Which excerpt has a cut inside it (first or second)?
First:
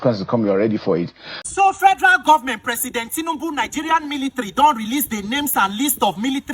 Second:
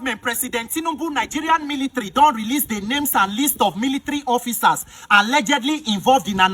first